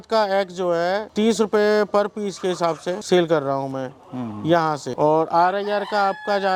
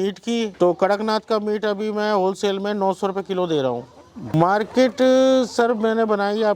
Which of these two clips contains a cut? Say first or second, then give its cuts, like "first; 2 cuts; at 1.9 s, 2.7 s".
second; 1 cut; at 4.3 s